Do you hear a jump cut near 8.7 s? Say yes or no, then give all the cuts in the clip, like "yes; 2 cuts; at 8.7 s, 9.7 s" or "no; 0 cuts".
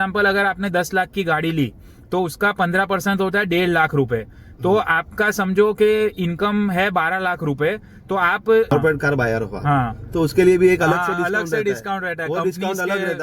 yes; 1 cut; at 8.7 s